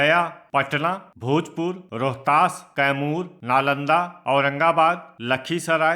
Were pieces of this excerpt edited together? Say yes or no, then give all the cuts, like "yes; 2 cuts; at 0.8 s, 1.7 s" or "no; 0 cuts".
yes; 3 cuts; at 1.0 s, 1.8 s, 3.3 s